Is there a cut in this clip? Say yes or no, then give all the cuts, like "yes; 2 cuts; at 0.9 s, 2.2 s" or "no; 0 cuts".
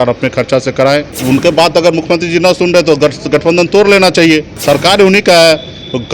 yes; 2 cuts; at 1.1 s, 4.6 s